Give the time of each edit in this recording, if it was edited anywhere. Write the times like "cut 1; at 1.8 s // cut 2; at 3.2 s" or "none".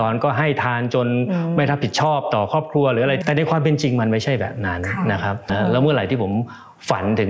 cut 1; at 3.2 s // cut 2; at 5.5 s